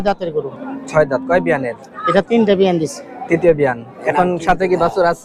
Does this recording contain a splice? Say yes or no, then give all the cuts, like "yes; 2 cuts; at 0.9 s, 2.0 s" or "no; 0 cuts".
no; 0 cuts